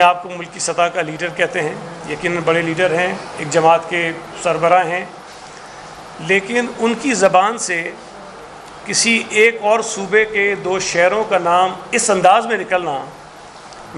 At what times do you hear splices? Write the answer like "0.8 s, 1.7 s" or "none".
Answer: none